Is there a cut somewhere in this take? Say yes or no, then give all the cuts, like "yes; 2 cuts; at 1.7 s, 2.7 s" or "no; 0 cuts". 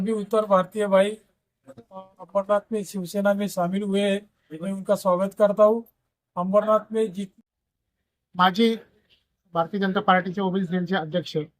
yes; 1 cut; at 7.2 s